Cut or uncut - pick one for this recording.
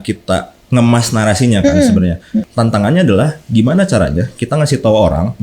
cut